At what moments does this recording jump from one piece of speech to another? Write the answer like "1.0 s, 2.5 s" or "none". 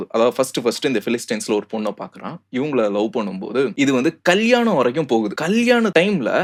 none